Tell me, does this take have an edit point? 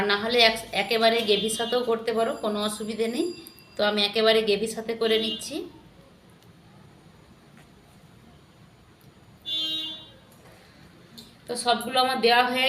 no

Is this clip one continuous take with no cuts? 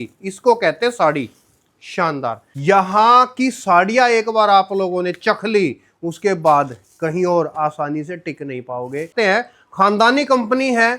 no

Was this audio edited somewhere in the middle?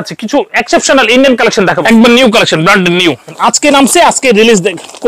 yes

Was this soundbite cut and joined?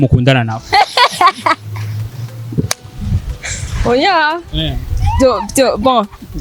no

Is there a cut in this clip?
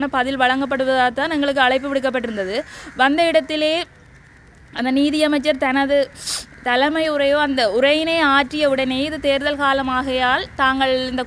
no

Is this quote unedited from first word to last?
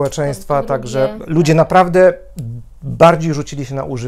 yes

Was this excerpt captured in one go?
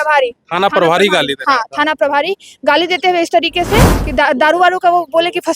no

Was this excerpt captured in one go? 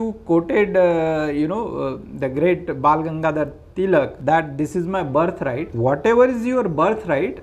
no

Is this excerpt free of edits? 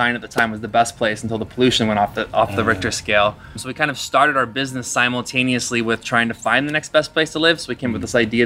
no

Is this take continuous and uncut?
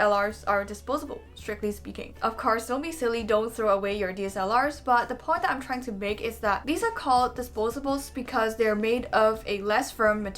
yes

